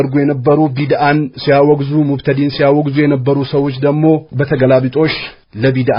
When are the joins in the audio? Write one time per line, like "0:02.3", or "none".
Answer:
none